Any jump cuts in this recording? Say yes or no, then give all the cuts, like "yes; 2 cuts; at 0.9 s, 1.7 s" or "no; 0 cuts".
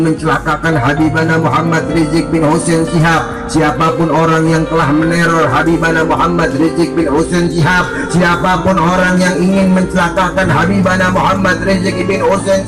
no; 0 cuts